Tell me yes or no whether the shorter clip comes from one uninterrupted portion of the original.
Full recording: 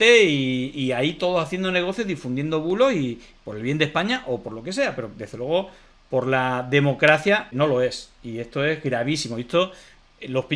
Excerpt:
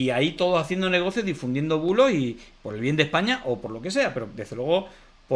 yes